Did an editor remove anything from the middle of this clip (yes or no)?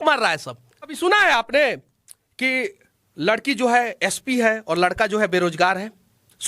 yes